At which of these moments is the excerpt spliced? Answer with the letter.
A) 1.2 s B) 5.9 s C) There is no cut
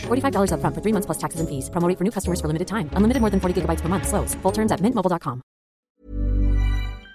B